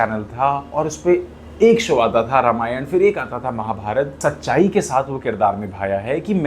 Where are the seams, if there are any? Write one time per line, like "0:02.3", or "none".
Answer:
0:04.1